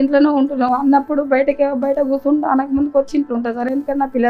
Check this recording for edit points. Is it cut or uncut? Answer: uncut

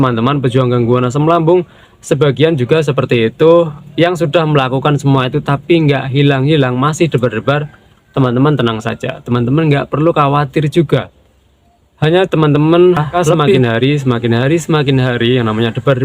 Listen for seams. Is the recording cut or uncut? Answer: cut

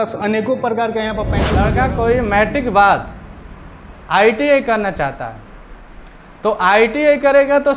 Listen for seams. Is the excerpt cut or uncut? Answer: cut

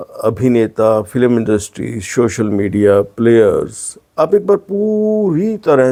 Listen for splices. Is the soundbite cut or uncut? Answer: uncut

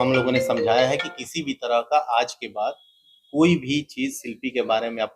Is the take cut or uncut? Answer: uncut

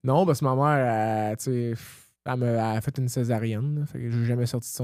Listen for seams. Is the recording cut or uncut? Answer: uncut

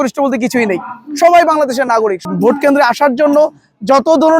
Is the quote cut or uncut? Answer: cut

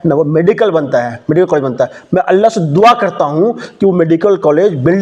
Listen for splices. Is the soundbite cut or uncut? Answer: uncut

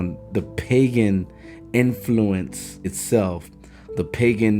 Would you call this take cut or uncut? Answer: cut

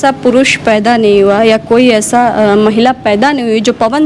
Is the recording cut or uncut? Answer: uncut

